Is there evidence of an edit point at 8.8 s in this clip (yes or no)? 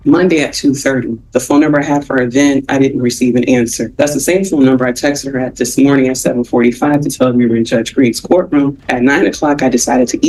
no